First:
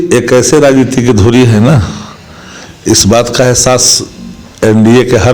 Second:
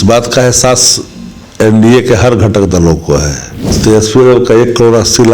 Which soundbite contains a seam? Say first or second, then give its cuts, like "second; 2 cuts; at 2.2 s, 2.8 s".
second; 1 cut; at 3.8 s